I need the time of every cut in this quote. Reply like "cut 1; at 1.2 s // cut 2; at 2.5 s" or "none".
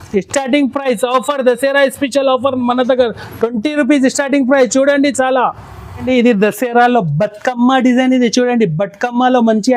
cut 1; at 6.0 s